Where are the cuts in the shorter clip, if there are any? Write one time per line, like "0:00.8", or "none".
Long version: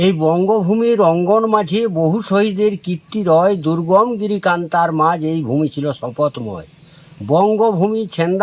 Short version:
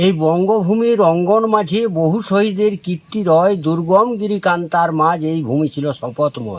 none